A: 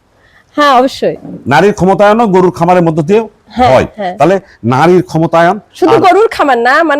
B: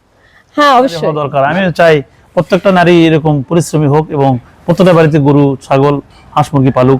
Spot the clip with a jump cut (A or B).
B